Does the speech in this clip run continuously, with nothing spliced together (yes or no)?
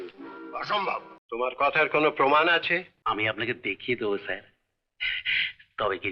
no